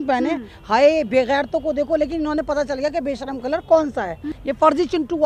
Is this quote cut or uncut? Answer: cut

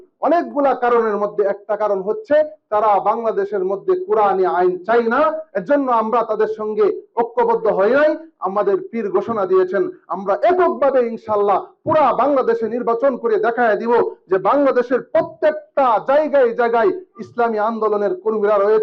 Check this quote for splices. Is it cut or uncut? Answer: uncut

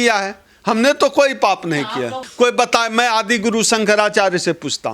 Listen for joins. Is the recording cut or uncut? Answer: cut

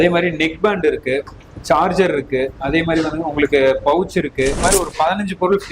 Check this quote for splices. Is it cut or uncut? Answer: cut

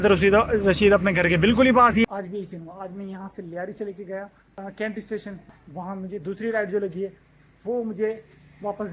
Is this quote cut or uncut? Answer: cut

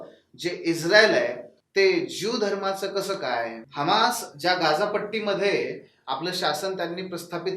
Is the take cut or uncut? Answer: cut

